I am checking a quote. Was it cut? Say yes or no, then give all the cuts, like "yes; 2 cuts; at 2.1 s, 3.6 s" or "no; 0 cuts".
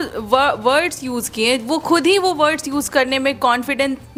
no; 0 cuts